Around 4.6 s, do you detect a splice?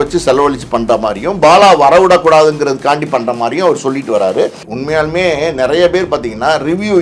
yes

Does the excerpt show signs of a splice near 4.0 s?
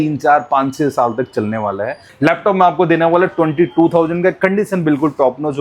no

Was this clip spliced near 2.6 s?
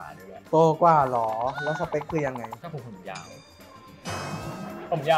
yes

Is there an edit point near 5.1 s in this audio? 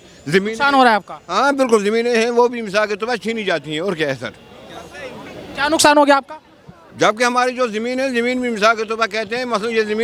no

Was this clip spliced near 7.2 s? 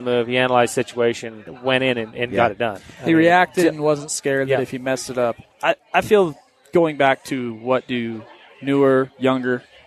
no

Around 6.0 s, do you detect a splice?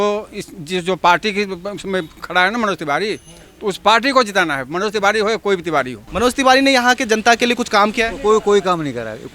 yes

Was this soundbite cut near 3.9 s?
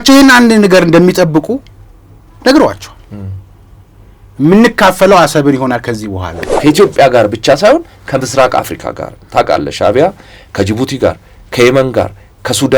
no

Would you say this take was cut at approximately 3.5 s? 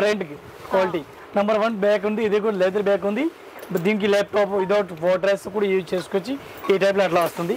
no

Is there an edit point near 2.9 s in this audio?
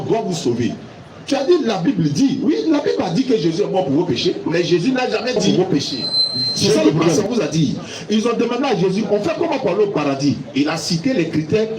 no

